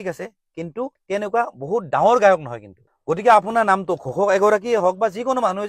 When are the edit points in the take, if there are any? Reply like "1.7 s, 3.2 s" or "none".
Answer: none